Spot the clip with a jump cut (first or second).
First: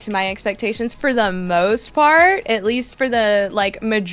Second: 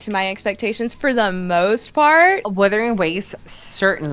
second